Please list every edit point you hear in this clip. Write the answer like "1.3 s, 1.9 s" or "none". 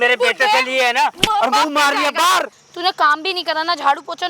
2.6 s